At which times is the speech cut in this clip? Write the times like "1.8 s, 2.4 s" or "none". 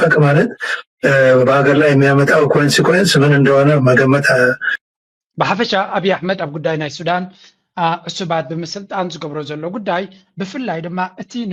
none